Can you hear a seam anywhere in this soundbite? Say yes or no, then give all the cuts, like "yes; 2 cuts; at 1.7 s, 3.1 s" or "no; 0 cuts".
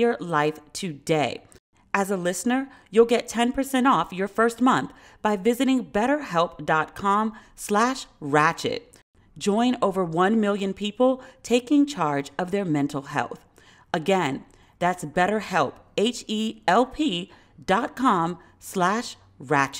no; 0 cuts